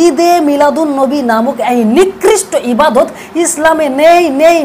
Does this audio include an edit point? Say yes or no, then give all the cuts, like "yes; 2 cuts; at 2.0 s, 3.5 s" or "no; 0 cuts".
no; 0 cuts